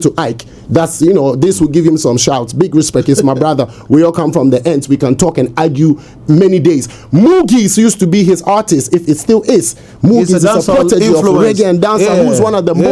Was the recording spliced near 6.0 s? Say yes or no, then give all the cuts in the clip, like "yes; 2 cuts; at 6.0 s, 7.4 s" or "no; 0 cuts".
no; 0 cuts